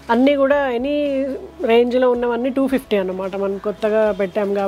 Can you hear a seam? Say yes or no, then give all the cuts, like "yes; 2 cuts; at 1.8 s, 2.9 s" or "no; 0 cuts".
no; 0 cuts